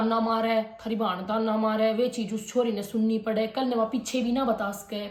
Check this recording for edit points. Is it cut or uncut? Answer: uncut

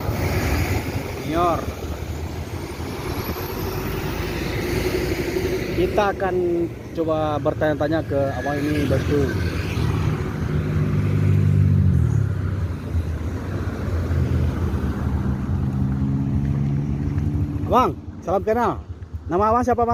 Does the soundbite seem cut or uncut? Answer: uncut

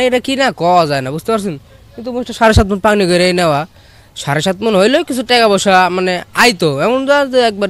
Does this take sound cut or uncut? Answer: uncut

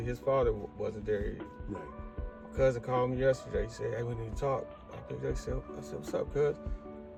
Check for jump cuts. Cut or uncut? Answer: uncut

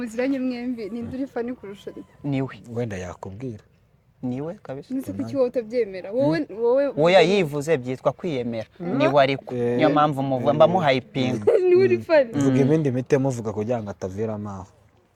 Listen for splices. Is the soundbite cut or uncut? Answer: uncut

